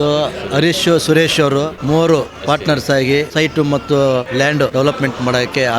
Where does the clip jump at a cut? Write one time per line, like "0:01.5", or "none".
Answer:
0:04.7